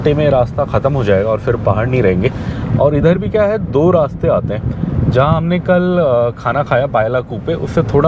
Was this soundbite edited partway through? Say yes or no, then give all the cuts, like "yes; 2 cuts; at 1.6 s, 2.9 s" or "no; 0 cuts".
no; 0 cuts